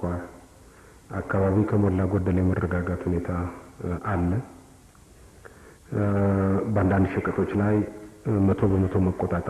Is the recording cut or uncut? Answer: uncut